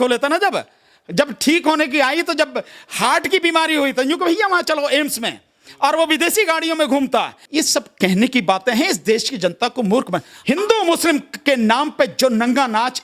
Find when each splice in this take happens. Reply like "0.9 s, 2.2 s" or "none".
7.4 s, 10.3 s